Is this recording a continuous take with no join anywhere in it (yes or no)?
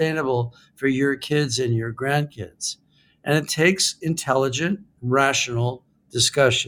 yes